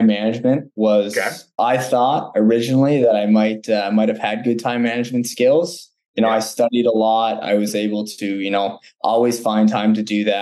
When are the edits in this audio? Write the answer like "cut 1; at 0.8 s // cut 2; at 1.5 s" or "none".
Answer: cut 1; at 1.5 s